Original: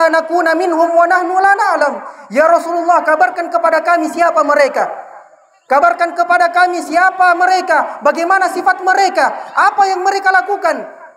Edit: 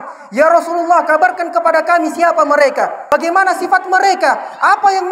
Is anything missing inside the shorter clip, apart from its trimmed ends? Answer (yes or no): yes